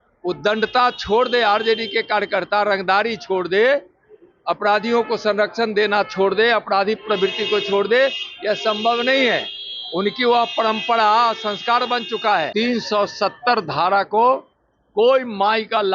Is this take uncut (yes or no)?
no